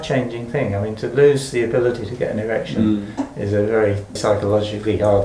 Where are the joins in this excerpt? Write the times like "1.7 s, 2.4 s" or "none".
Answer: 4.2 s

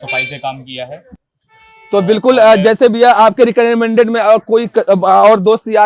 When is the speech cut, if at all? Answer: none

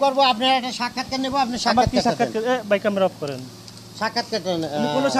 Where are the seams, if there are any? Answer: none

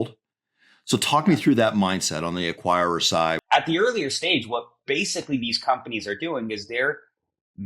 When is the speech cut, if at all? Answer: 3.4 s

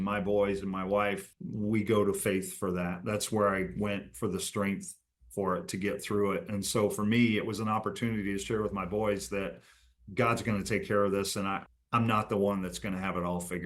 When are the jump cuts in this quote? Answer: 1.3 s

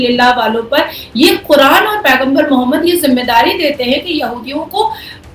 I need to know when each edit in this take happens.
none

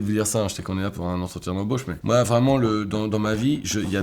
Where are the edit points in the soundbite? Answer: 1.9 s

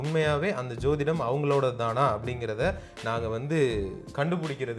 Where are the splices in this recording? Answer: none

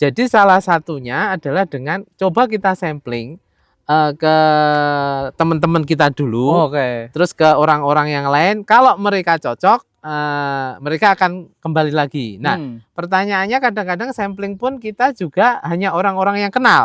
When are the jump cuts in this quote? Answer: none

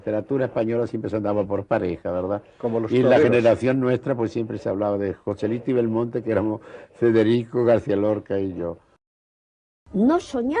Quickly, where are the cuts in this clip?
9.2 s

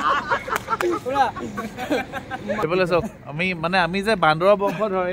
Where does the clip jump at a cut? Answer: 2.6 s

